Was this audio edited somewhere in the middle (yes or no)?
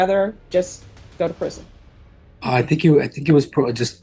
no